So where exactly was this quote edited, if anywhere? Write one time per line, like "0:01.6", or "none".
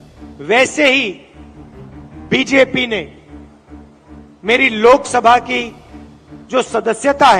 none